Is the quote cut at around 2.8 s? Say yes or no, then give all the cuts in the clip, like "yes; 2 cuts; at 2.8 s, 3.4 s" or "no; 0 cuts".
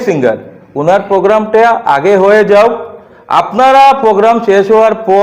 no; 0 cuts